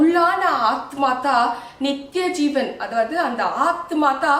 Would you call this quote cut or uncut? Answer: uncut